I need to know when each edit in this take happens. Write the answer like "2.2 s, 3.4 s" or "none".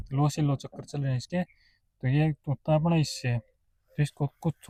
none